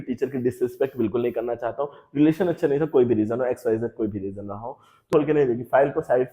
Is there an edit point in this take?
yes; 1 cut; at 5.1 s

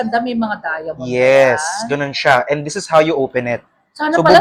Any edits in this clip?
no; 0 cuts

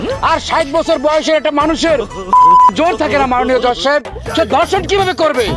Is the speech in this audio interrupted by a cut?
no; 0 cuts

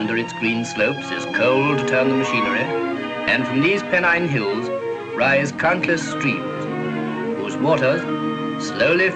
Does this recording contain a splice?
yes; 1 cut; at 3.4 s

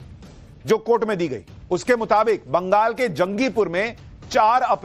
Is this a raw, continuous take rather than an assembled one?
yes; 0 cuts

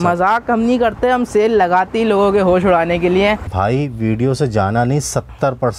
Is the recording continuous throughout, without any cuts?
no; 1 cut; at 3.5 s

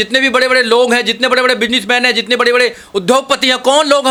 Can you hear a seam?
no; 0 cuts

